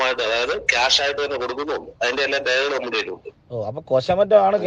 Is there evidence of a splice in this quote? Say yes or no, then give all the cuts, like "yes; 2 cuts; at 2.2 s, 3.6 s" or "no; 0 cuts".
no; 0 cuts